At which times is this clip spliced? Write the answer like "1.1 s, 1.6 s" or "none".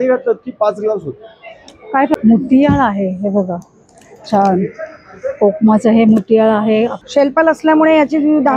2.1 s, 7.0 s